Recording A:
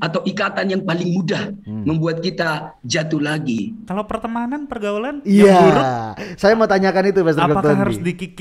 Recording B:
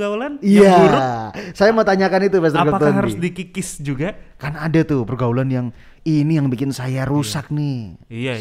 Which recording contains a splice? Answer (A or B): A